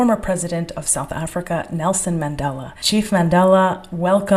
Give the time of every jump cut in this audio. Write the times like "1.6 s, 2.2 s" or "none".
none